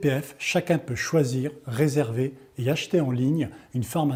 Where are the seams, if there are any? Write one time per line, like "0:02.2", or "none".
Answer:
none